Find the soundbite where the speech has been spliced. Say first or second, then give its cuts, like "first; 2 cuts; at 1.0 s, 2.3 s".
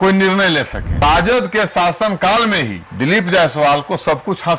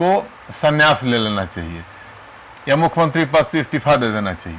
first; 2 cuts; at 1.0 s, 2.8 s